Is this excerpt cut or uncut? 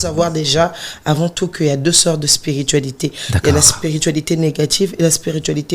uncut